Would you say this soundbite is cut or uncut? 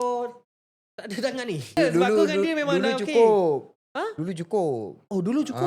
cut